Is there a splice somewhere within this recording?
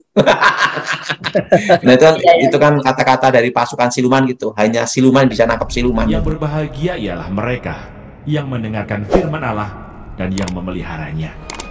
yes; 1 cut; at 6.3 s

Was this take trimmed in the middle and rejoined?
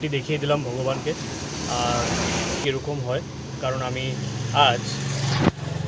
yes; 1 cut; at 2.6 s

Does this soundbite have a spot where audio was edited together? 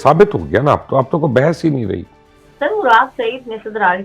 no; 0 cuts

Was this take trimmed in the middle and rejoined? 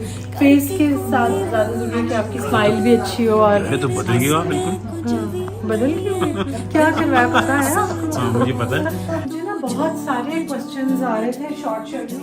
yes; 1 cut; at 9.3 s

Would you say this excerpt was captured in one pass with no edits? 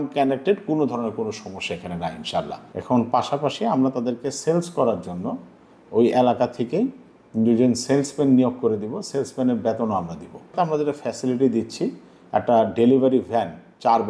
no; 2 cuts; at 2.6 s, 10.5 s

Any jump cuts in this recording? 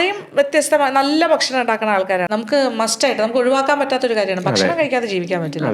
yes; 1 cut; at 2.3 s

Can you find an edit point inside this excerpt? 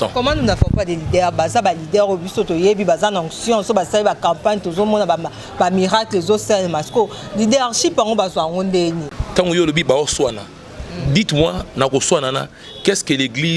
yes; 1 cut; at 9.1 s

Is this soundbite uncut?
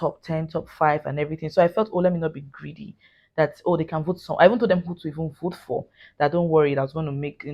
yes; 0 cuts

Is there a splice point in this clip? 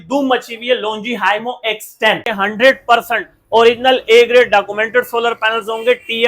yes; 1 cut; at 2.3 s

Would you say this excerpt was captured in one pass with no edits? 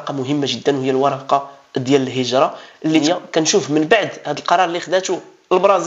no; 1 cut; at 3.0 s

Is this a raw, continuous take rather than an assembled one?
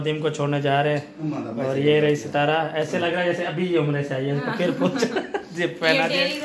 yes; 0 cuts

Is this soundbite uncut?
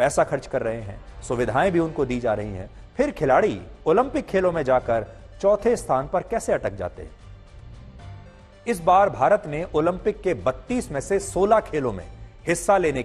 yes; 0 cuts

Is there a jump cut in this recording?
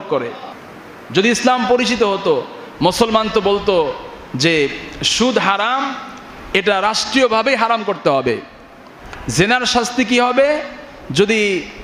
no; 0 cuts

